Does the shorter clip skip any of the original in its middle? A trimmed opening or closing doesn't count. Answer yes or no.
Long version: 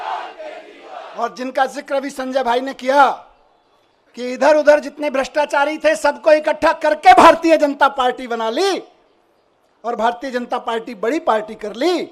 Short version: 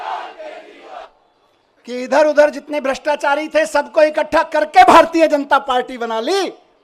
yes